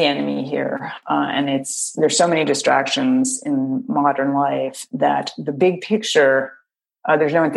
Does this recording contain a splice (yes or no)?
yes